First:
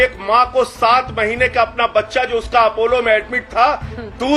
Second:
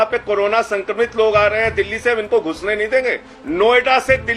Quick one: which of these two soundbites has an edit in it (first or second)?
second